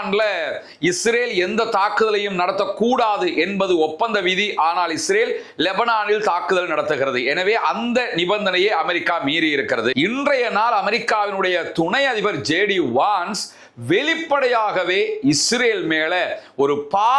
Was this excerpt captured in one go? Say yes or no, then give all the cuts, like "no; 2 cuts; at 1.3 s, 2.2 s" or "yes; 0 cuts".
no; 1 cut; at 9.9 s